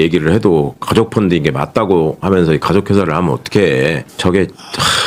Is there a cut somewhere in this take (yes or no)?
yes